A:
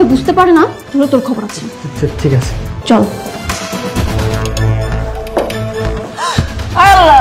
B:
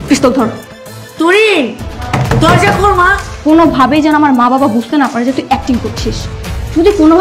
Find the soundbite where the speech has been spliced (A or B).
A